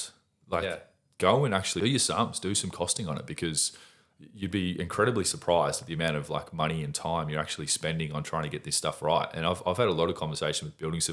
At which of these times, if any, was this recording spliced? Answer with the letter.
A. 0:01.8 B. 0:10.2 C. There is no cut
A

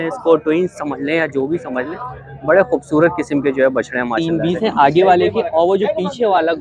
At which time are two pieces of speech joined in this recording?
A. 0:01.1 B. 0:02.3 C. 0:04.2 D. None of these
C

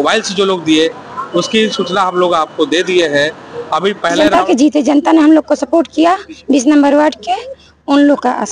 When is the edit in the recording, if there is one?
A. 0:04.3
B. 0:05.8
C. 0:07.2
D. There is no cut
A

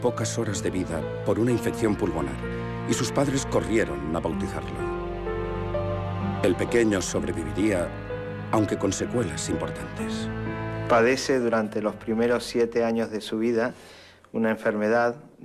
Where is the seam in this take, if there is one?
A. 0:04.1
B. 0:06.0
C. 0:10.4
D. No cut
A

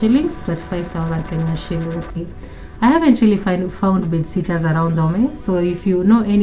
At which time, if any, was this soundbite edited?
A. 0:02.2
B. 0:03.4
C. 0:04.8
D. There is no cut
A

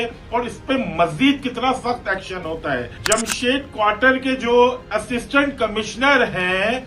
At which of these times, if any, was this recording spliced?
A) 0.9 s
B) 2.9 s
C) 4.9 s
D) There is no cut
B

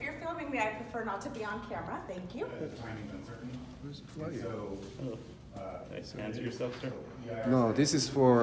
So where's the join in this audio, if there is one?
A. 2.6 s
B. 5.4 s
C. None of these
A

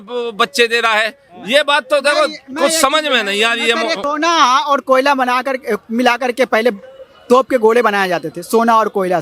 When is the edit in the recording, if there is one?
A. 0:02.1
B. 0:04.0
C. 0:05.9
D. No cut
B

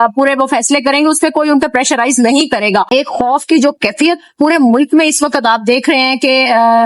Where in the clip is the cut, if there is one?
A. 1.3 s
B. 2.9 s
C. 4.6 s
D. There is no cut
B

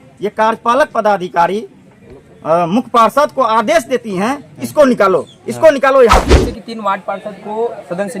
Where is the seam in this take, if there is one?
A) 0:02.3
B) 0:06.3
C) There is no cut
B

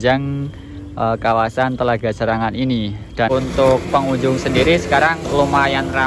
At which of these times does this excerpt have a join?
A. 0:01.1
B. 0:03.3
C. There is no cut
B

